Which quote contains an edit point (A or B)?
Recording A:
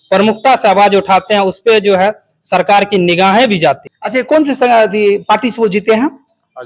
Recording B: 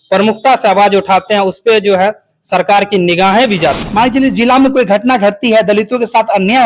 B